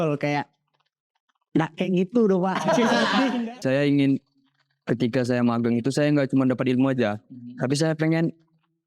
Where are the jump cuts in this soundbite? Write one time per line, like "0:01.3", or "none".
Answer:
0:03.5